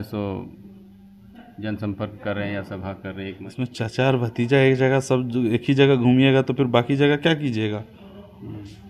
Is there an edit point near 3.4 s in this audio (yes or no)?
yes